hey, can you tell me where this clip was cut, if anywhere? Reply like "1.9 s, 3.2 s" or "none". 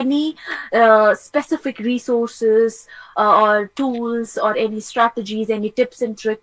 none